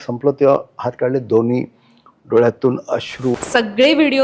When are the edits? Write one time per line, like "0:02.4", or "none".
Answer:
0:03.3

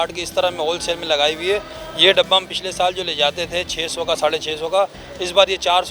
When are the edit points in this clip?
none

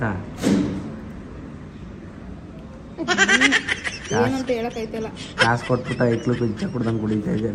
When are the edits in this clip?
none

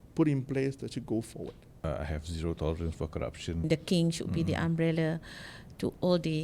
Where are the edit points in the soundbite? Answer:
0:01.8
0:03.6

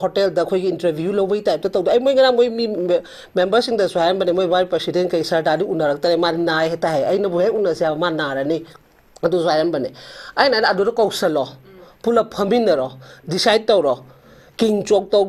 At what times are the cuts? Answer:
none

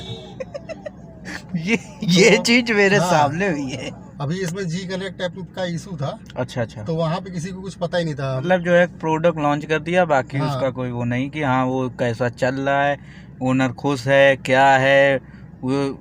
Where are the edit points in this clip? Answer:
0:04.0
0:08.4

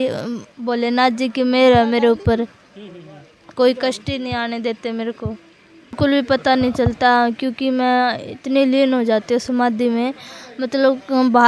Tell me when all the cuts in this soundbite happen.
0:06.0

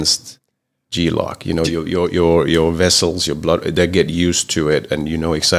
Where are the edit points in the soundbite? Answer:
none

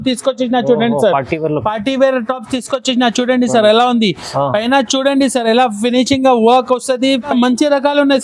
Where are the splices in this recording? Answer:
0:07.3

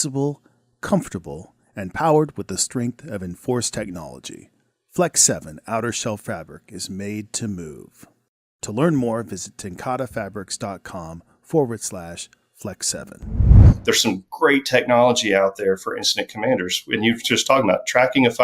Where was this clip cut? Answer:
0:13.6

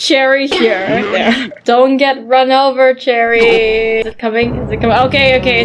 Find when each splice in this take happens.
0:01.6
0:04.1

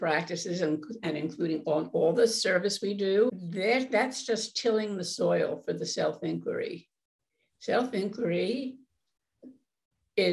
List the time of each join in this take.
0:03.3

